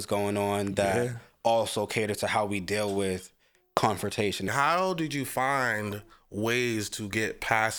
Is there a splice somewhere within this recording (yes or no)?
yes